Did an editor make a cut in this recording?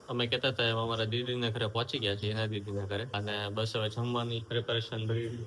yes; 2 cuts; at 3.1 s, 4.4 s

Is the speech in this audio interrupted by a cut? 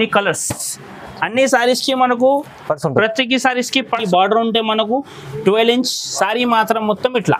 yes; 1 cut; at 4.0 s

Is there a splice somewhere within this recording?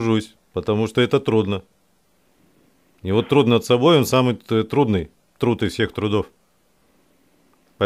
no; 0 cuts

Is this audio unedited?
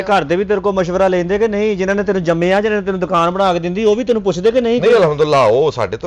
yes; 0 cuts

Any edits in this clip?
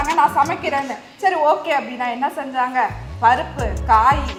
no; 0 cuts

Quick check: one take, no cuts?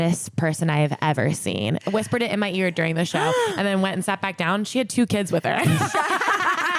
yes; 0 cuts

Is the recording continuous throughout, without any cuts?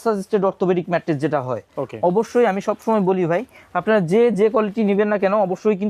yes; 0 cuts

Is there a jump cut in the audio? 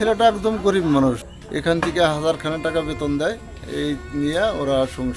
yes; 1 cut; at 1.2 s

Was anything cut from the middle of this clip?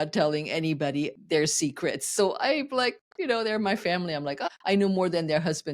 yes; 2 cuts; at 1.2 s, 4.4 s

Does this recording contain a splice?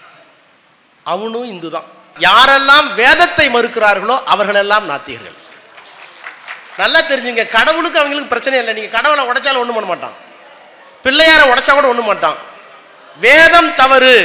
yes; 1 cut; at 2.1 s

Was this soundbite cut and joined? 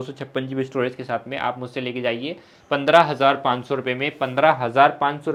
no; 0 cuts

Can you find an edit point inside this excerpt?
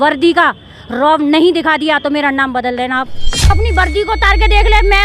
yes; 1 cut; at 3.5 s

